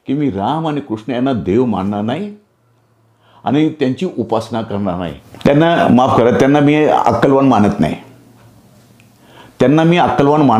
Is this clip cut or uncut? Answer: cut